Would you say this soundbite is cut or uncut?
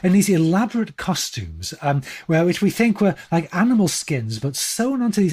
uncut